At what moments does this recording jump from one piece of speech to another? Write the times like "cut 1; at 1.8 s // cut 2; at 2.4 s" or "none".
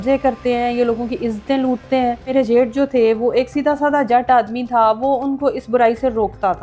cut 1; at 2.3 s